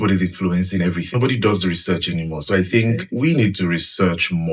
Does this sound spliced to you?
yes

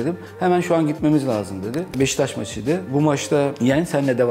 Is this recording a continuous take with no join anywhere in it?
no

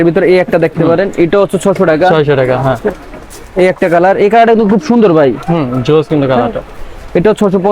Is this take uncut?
yes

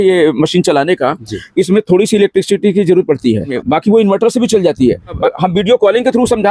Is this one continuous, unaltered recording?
no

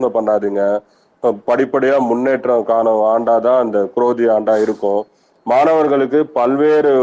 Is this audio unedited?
no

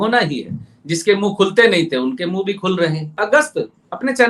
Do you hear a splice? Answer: yes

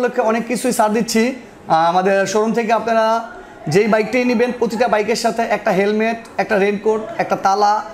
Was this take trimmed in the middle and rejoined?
no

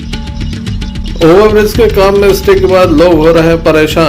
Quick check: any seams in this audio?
yes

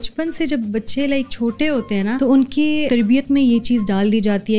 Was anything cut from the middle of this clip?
yes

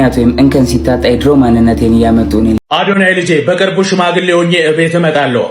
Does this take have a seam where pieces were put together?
yes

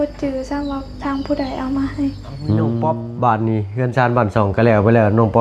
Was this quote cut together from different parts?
yes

